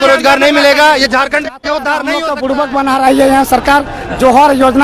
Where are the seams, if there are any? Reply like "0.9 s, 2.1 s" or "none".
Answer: 2.1 s

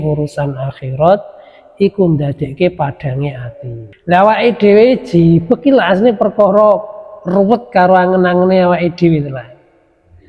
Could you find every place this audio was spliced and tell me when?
3.9 s

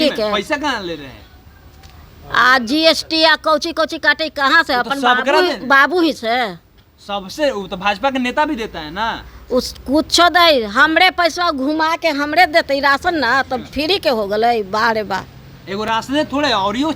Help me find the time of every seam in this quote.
none

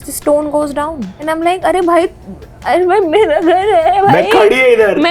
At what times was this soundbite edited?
1.1 s

